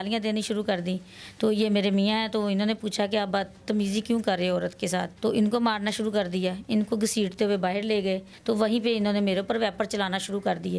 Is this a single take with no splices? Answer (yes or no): no